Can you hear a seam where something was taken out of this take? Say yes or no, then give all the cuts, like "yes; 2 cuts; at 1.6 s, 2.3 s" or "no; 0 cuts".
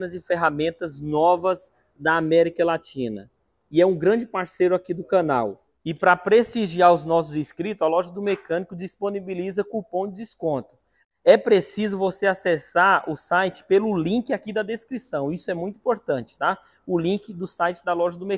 no; 0 cuts